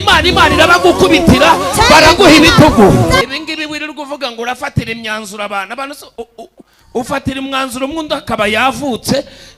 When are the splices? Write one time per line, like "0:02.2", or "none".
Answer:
0:03.2